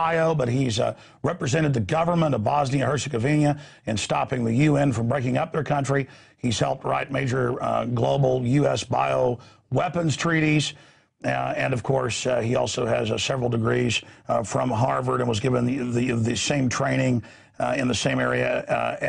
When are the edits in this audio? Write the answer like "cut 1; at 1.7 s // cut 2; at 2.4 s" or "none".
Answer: cut 1; at 11.1 s